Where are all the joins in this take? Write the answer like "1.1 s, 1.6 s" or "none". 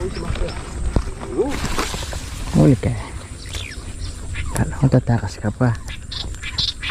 1.5 s

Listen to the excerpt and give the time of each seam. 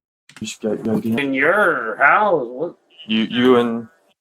1.2 s

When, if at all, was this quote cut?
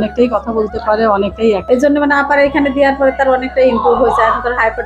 1.6 s

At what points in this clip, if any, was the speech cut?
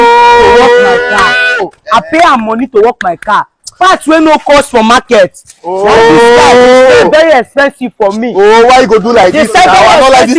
none

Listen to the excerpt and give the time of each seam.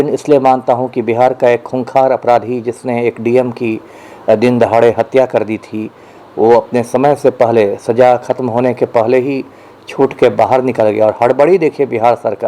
none

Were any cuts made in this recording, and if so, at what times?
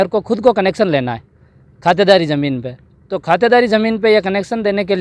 none

